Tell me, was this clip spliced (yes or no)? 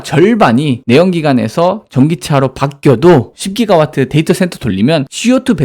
yes